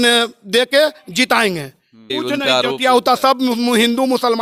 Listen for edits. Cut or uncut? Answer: uncut